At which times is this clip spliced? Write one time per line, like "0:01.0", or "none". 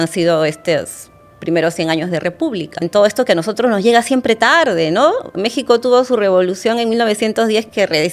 0:02.8